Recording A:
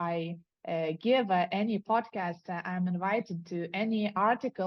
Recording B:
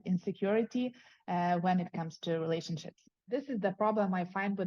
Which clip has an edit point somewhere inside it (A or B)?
B